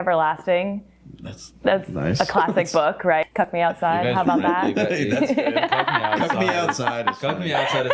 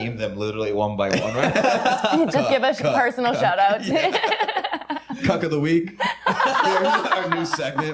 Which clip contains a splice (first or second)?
first